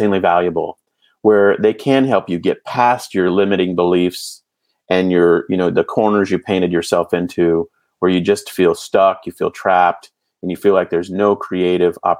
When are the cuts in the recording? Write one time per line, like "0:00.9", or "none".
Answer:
none